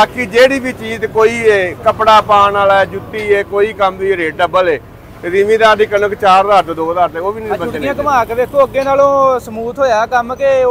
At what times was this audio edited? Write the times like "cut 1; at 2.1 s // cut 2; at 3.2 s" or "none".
cut 1; at 7.6 s